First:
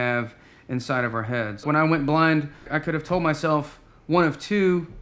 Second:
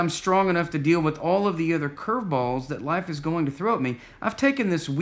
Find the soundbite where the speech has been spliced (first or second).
first